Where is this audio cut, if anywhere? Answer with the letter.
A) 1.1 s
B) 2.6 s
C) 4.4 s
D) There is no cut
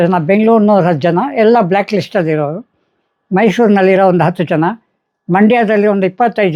D